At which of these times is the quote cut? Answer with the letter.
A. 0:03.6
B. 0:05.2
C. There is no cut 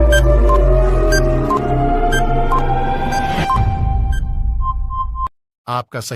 B